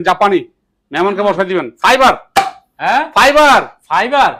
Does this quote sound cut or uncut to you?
uncut